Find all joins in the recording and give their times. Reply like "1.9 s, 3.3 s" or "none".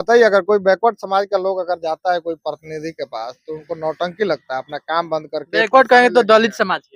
none